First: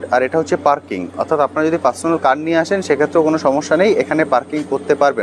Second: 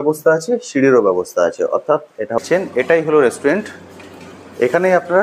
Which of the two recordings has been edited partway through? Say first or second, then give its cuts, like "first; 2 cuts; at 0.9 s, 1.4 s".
second; 1 cut; at 2.4 s